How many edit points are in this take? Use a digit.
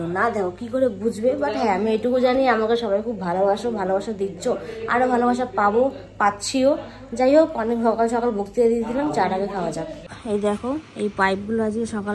1